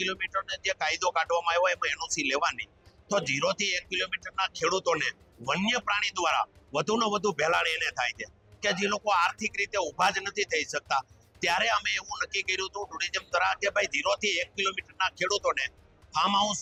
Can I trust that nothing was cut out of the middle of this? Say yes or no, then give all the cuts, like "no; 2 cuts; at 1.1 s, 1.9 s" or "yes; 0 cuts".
yes; 0 cuts